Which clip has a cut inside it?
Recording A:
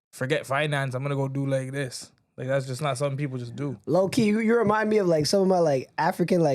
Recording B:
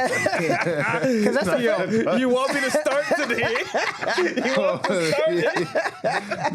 A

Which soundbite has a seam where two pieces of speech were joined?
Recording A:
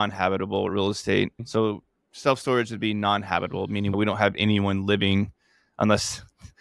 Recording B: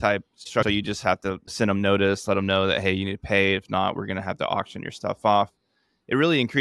A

